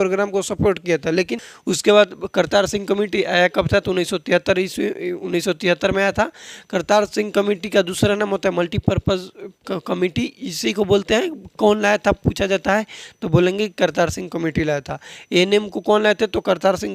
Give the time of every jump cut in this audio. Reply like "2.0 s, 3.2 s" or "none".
1.5 s